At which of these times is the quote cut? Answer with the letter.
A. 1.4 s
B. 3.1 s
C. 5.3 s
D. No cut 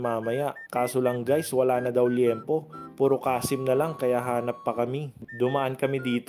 C